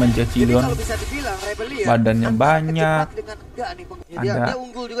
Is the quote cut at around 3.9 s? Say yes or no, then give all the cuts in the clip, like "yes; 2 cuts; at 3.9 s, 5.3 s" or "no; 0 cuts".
yes; 1 cut; at 3.9 s